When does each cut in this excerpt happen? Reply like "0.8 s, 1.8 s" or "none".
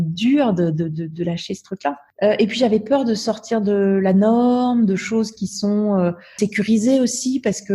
2.1 s, 6.3 s